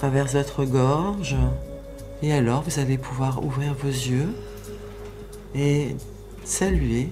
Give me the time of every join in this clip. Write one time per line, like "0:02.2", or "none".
none

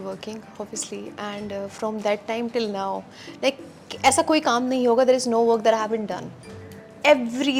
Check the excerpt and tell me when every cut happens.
none

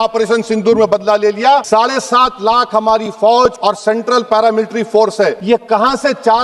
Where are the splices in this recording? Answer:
0:01.6
0:03.6
0:05.4

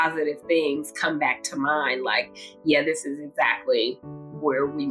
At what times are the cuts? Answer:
none

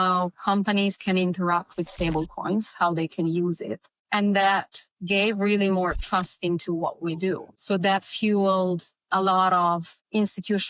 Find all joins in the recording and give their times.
none

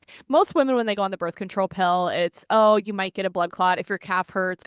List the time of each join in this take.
none

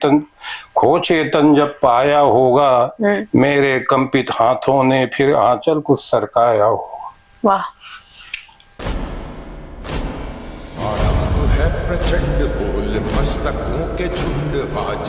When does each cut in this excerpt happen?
0:08.7

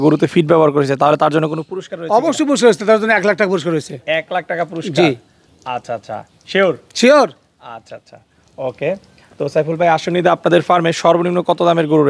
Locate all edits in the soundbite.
none

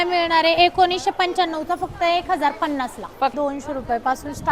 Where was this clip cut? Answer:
0:03.3

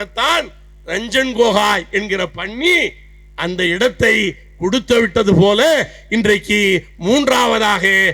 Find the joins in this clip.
none

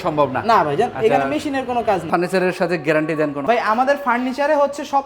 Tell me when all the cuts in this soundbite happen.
0:02.1
0:03.4

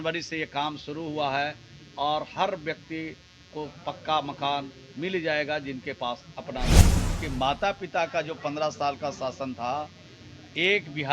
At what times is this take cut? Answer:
0:07.0

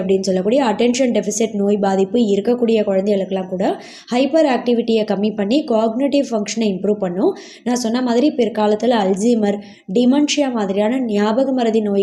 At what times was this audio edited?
none

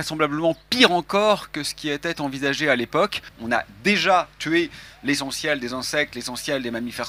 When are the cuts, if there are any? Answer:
0:03.3

